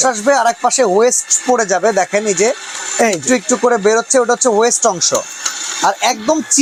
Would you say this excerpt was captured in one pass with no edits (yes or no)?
yes